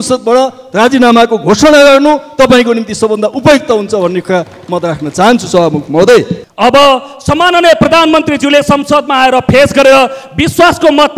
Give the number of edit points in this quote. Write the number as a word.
one